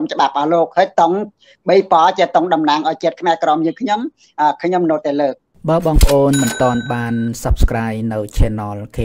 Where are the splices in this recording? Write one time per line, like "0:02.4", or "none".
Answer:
0:05.5